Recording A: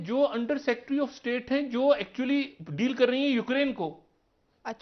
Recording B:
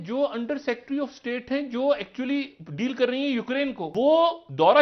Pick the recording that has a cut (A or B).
B